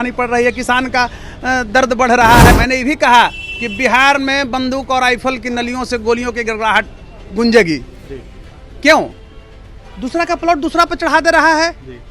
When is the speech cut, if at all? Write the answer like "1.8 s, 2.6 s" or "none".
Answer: 2.5 s